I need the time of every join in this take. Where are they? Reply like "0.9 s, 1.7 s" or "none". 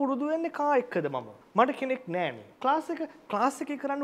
1.4 s, 2.4 s